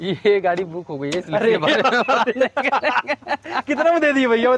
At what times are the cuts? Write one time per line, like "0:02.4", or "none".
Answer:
none